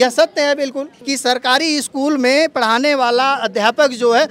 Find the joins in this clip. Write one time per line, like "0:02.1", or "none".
0:00.9